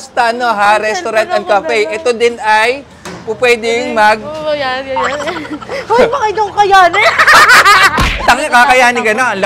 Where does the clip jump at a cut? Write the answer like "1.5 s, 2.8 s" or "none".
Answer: none